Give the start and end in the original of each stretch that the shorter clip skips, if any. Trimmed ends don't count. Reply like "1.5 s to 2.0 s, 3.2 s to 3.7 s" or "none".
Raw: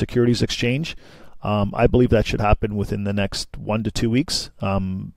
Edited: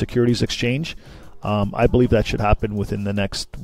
none